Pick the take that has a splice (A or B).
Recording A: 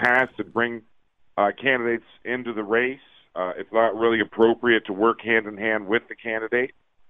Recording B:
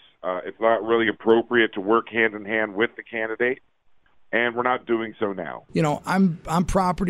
B